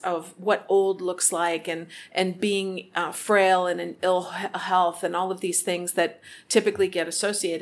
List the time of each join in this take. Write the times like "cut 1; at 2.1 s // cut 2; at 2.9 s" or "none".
none